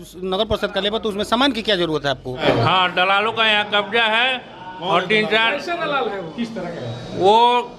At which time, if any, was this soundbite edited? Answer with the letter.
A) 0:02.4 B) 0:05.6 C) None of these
A